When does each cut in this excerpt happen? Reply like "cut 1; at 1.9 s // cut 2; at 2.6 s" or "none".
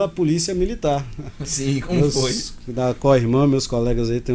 none